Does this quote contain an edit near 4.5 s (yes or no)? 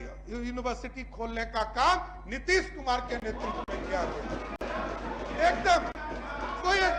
no